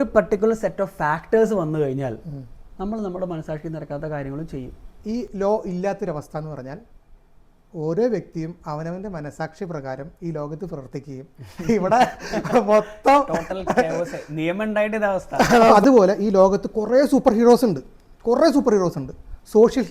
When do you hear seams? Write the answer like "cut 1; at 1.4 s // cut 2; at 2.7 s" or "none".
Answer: cut 1; at 4.8 s // cut 2; at 15.7 s